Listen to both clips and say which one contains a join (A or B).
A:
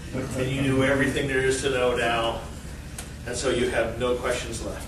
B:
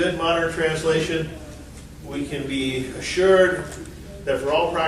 B